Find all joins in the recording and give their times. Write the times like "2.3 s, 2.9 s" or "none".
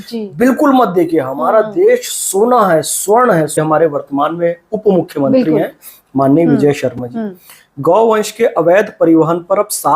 3.6 s